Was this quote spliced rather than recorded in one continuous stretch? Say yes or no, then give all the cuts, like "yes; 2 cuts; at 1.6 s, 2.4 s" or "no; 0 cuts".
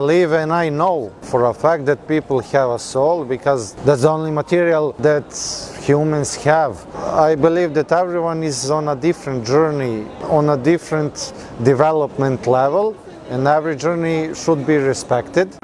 yes; 5 cuts; at 1.2 s, 3.7 s, 4.9 s, 7.0 s, 10.1 s